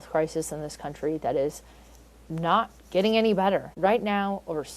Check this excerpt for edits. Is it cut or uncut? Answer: cut